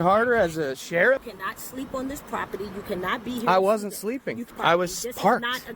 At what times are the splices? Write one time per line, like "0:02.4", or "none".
0:01.3
0:04.5